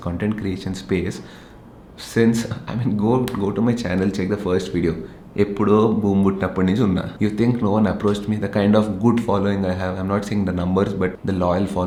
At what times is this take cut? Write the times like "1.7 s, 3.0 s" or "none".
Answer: none